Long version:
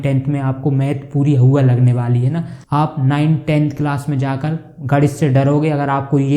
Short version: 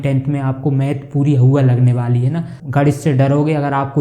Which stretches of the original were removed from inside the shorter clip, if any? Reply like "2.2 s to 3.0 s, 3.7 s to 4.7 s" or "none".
2.6 s to 4.7 s